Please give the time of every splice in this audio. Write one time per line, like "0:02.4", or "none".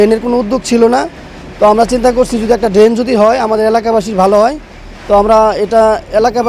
none